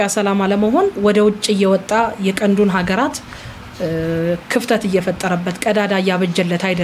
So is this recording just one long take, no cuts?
yes; 0 cuts

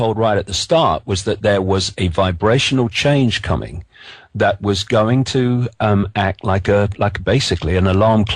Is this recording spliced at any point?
no; 0 cuts

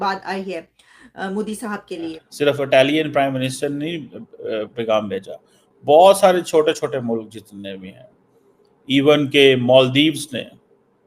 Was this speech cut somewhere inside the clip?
yes; 1 cut; at 2.2 s

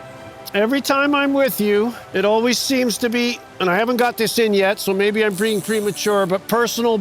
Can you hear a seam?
yes; 1 cut; at 2.0 s

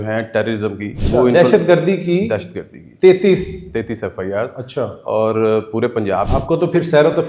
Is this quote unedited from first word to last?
no; 2 cuts; at 0.9 s, 6.3 s

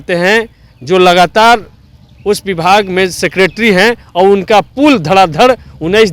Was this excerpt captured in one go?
yes; 0 cuts

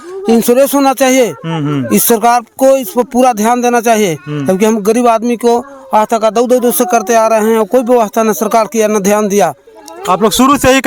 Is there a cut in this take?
no; 0 cuts

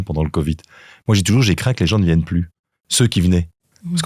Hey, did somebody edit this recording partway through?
no; 0 cuts

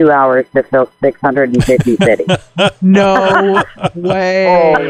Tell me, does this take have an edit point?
no; 0 cuts

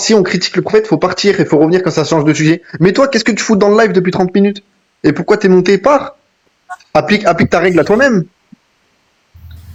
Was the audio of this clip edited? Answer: no; 0 cuts

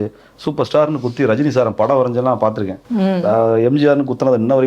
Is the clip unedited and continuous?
yes; 0 cuts

